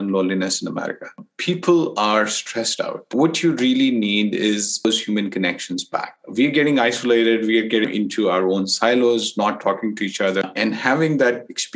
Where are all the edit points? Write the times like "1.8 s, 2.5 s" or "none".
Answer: 3.0 s, 4.8 s, 7.9 s, 10.4 s